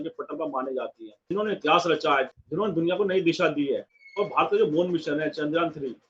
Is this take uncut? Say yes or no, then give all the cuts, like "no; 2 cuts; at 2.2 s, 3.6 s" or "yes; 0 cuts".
no; 3 cuts; at 1.3 s, 2.3 s, 4.0 s